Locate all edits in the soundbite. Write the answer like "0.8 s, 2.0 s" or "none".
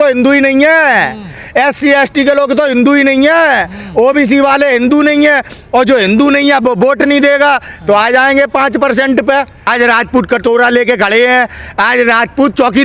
9.7 s